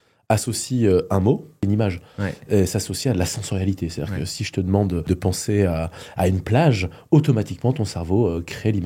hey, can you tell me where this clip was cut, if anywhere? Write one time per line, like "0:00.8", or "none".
0:01.6
0:05.0